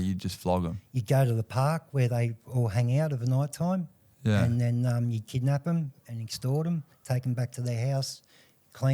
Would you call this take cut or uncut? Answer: uncut